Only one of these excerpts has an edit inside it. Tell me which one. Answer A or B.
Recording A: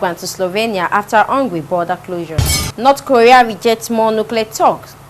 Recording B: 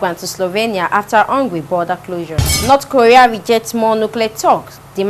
B